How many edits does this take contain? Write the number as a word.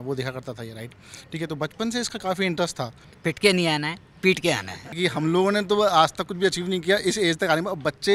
two